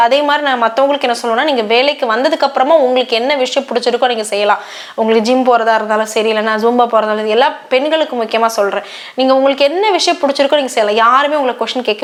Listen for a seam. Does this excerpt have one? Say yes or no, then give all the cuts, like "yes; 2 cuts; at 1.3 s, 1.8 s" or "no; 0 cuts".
no; 0 cuts